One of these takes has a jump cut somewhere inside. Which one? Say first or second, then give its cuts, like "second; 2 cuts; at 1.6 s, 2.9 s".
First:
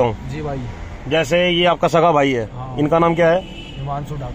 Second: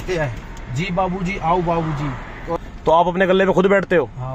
second; 1 cut; at 2.6 s